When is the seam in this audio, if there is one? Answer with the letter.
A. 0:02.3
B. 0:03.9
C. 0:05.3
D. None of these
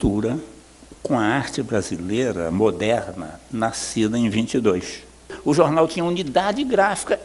C